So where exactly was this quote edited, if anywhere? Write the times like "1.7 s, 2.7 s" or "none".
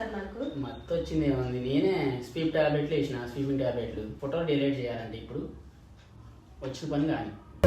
4.1 s